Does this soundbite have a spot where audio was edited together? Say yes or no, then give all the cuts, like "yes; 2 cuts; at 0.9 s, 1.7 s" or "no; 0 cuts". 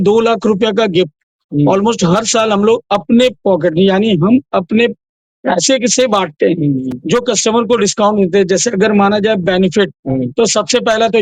no; 0 cuts